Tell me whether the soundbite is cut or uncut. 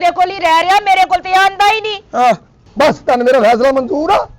cut